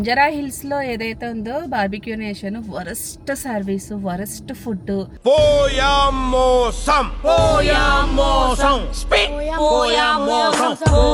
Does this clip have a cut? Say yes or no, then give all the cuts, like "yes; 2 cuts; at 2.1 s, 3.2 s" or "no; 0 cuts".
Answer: no; 0 cuts